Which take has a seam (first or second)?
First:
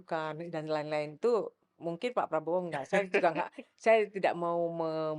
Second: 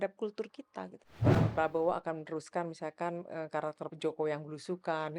second